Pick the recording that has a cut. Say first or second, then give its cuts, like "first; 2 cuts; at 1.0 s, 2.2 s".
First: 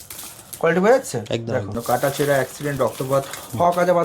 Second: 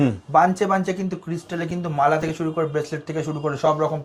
first; 1 cut; at 1.8 s